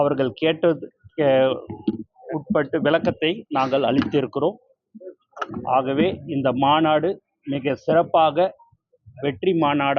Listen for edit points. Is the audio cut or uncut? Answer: uncut